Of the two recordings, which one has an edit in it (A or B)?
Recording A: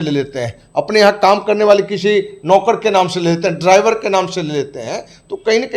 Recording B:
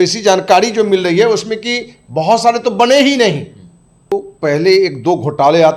B